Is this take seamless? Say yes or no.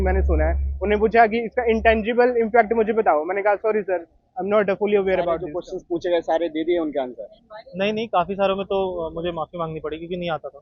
no